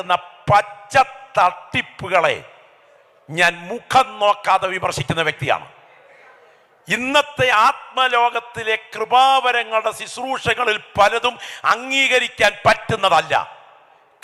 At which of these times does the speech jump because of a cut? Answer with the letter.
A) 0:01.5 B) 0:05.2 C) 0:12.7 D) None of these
D